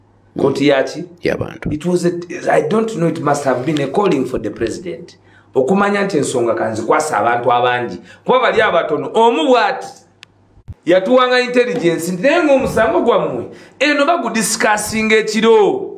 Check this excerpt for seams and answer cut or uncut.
uncut